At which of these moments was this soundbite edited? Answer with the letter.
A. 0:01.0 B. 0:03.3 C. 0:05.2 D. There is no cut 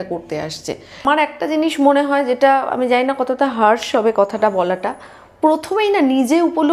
A